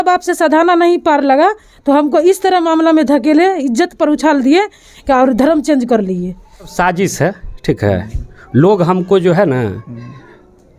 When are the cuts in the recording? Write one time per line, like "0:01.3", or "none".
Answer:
0:06.7